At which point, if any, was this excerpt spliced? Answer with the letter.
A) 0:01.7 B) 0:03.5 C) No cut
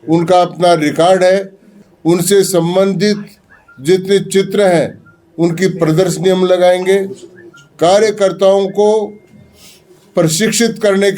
A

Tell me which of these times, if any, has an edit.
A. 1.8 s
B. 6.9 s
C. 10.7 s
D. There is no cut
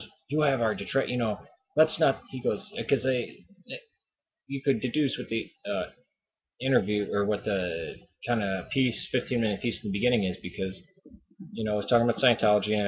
B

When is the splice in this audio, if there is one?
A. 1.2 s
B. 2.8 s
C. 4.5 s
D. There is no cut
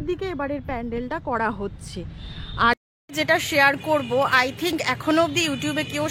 B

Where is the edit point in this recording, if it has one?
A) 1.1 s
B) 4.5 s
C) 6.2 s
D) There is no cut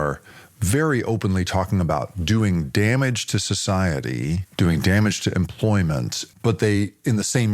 C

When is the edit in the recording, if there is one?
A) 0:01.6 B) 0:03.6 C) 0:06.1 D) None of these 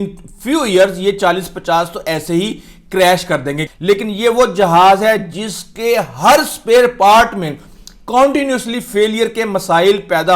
B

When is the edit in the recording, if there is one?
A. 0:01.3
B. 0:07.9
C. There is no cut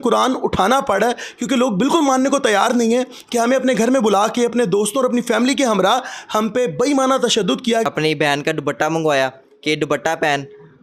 B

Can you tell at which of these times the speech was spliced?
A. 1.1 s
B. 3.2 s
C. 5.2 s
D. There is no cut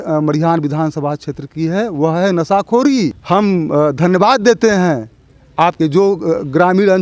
B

